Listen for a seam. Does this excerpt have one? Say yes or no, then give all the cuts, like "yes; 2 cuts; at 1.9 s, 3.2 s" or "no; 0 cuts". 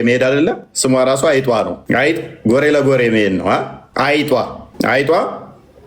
yes; 3 cuts; at 1.8 s, 3.8 s, 4.6 s